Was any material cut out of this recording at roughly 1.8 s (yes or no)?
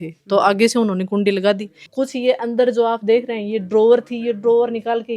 yes